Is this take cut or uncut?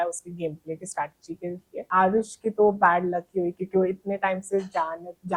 cut